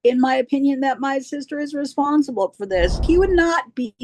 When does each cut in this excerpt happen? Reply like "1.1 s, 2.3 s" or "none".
3.0 s